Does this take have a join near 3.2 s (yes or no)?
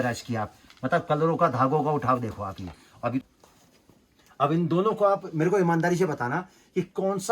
yes